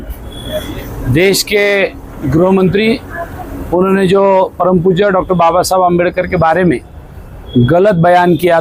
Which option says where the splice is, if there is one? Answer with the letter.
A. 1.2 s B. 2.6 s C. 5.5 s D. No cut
D